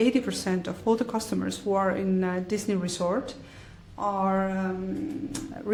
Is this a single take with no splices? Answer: yes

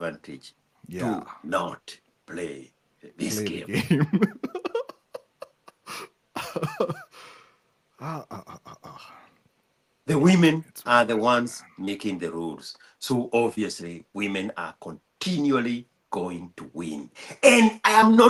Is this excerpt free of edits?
yes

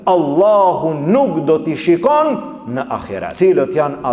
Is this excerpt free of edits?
no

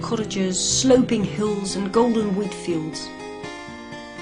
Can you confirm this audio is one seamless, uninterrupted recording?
no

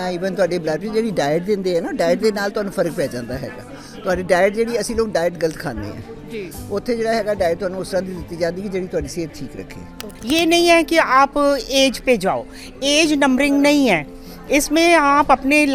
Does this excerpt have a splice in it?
yes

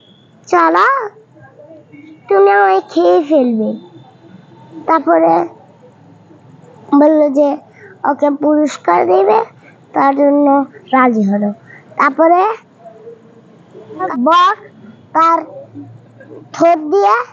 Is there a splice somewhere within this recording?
yes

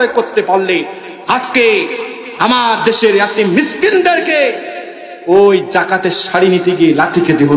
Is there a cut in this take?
no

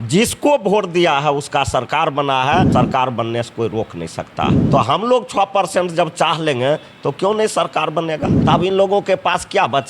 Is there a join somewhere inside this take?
yes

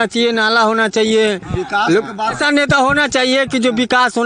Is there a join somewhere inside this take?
yes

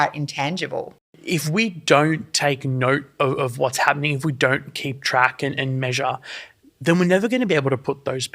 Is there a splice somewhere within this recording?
yes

